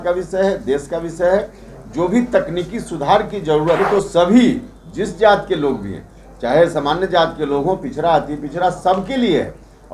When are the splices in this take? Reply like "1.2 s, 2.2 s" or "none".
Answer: 3.8 s